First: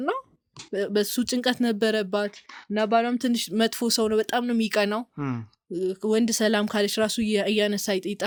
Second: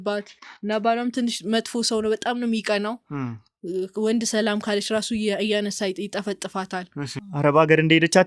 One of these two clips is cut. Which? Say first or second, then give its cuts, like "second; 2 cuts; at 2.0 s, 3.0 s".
second; 1 cut; at 7.1 s